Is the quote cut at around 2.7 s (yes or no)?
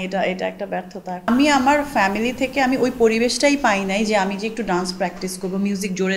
no